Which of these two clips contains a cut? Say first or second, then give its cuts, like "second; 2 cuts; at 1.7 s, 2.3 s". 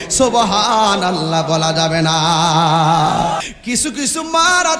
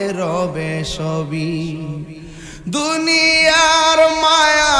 first; 1 cut; at 3.4 s